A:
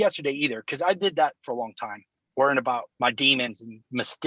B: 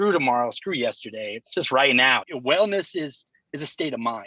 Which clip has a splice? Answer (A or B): B